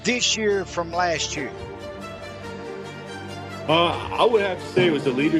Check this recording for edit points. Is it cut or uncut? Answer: uncut